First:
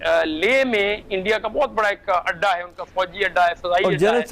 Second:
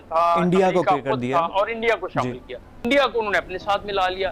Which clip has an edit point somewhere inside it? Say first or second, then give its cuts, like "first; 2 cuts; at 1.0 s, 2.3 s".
second; 1 cut; at 2.8 s